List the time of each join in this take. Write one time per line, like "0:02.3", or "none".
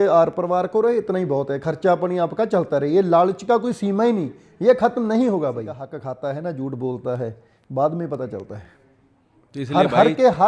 0:05.9